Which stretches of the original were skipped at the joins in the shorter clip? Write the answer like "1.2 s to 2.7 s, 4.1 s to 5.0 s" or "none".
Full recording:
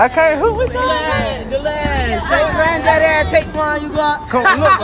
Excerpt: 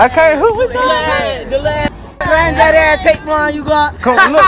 2.2 s to 2.5 s